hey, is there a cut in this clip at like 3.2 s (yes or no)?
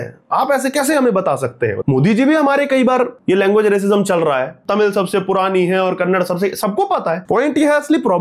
yes